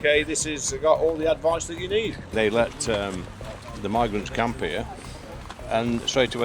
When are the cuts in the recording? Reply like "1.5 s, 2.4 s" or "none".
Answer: 2.3 s